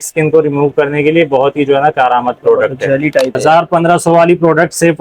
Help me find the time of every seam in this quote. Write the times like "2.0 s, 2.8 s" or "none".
3.4 s